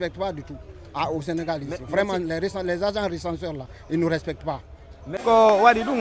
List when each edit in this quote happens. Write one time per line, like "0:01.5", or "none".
0:05.1